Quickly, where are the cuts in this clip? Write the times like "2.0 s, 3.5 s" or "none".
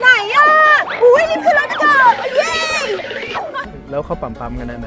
3.8 s